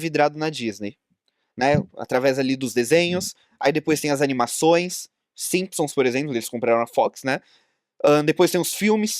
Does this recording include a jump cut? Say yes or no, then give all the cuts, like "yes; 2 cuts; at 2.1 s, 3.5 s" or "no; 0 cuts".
no; 0 cuts